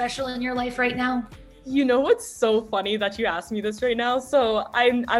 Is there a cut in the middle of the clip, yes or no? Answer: no